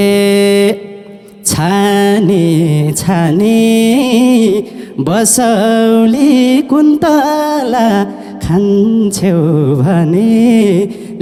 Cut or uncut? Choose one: uncut